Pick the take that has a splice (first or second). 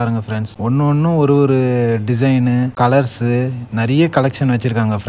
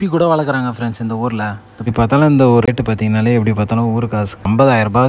second